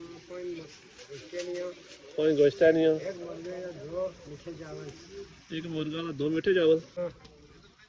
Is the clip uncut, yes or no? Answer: no